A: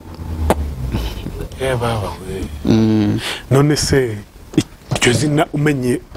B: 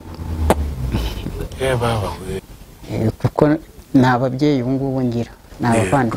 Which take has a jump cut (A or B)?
B